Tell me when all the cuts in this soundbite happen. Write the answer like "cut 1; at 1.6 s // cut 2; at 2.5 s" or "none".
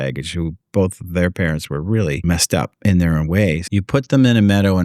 cut 1; at 2.2 s // cut 2; at 3.6 s